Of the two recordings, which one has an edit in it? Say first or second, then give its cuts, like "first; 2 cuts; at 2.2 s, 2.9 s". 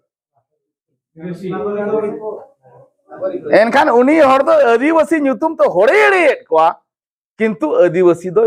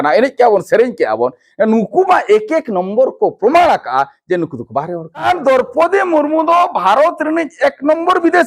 second; 1 cut; at 5.3 s